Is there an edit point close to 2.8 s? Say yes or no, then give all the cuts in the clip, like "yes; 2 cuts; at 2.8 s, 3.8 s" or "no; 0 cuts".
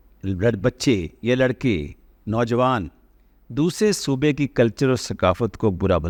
no; 0 cuts